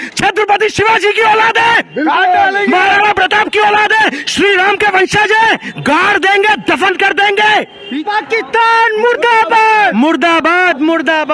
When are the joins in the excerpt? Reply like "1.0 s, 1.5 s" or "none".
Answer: 8.0 s